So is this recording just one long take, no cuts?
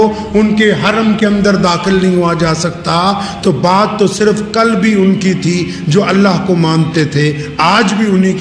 yes; 0 cuts

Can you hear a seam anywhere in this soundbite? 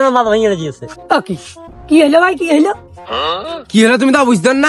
yes; 1 cut; at 1.0 s

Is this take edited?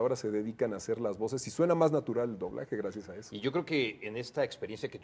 yes; 1 cut; at 1.3 s

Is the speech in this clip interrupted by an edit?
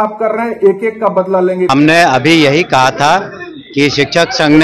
yes; 1 cut; at 1.7 s

